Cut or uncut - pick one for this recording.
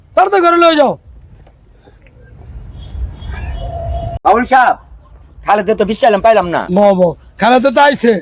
uncut